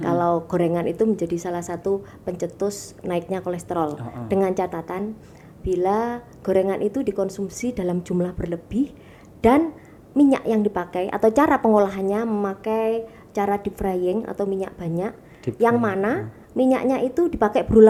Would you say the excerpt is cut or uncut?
uncut